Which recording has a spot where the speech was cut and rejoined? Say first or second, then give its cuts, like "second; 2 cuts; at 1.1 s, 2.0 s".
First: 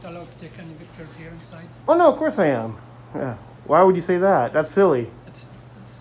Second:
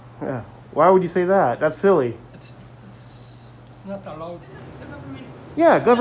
second; 1 cut; at 4.5 s